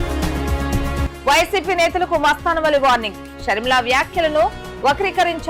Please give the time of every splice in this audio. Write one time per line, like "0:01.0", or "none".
none